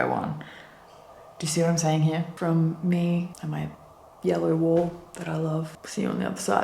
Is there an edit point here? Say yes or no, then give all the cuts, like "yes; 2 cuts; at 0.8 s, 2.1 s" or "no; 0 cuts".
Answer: yes; 3 cuts; at 2.3 s, 3.8 s, 5.8 s